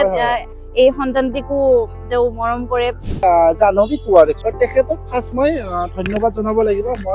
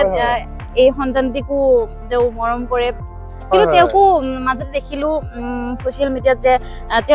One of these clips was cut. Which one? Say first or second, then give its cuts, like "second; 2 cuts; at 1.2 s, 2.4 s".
first; 2 cuts; at 3.2 s, 4.4 s